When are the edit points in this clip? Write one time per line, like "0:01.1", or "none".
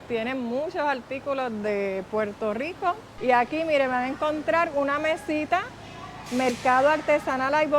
0:03.1